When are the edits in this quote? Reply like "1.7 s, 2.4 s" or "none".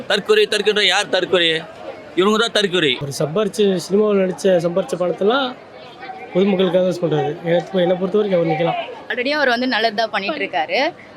3.1 s, 9.0 s

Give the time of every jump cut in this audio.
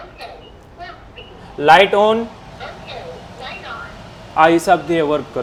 none

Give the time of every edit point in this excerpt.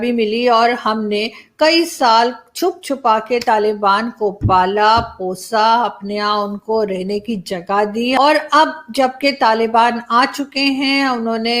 8.2 s

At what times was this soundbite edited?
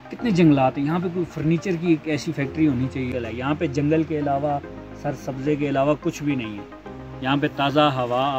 3.1 s

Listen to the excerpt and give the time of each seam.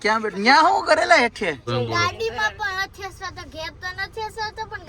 1.6 s

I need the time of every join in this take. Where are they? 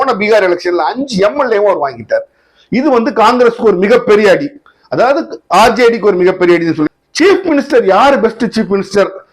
6.9 s

